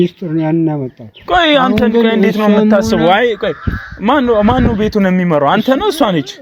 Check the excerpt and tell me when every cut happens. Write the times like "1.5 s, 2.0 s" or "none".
none